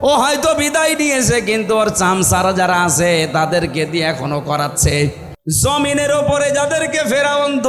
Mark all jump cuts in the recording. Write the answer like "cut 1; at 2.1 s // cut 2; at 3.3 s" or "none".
cut 1; at 5.3 s

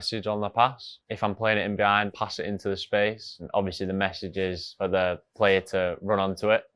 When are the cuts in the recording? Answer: none

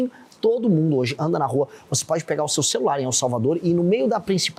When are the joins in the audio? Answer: none

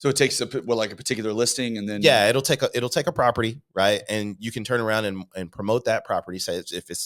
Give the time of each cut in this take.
none

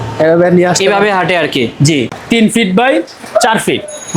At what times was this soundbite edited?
cut 1; at 2.2 s

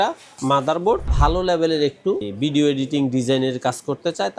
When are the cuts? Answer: cut 1; at 1.1 s // cut 2; at 2.3 s

